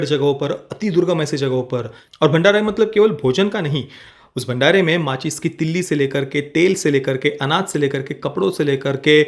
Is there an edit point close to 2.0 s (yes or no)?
yes